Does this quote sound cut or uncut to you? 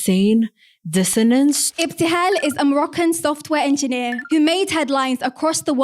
cut